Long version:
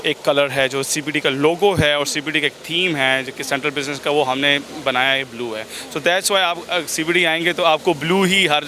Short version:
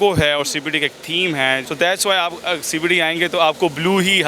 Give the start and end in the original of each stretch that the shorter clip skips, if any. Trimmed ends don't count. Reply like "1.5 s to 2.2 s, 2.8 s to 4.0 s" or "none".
3.3 s to 5.9 s